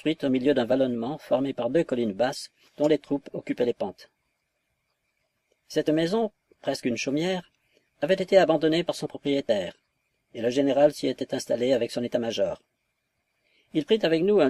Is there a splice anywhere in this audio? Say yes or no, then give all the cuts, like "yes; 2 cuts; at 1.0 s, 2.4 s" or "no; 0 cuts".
no; 0 cuts